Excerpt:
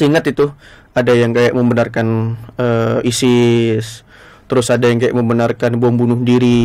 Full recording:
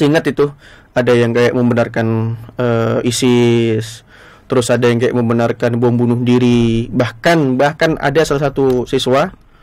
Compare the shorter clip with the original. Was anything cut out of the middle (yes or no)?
no